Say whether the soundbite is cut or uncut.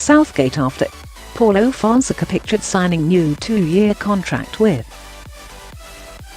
cut